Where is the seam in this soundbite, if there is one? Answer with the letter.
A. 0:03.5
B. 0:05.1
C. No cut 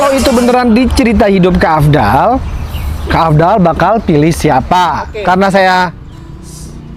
B